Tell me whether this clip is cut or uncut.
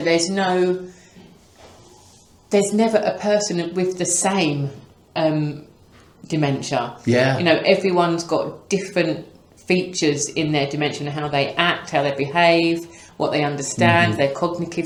uncut